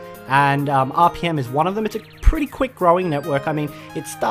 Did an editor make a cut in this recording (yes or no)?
yes